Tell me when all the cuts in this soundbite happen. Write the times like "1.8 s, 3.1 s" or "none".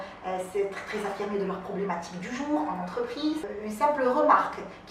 3.5 s